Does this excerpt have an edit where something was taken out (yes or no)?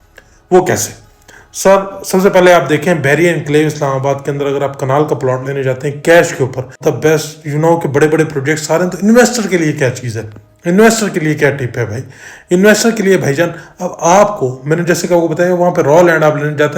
yes